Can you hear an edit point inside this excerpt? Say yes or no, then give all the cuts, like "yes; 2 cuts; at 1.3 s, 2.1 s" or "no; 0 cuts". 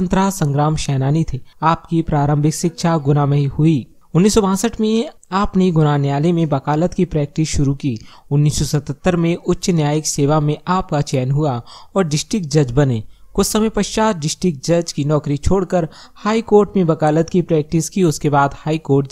no; 0 cuts